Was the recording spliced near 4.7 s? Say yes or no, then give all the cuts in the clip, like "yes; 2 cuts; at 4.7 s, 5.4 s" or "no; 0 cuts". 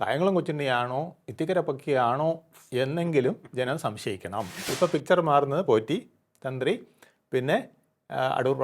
yes; 1 cut; at 4.7 s